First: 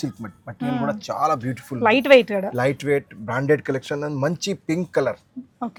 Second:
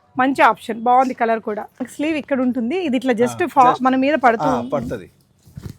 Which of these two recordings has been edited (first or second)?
second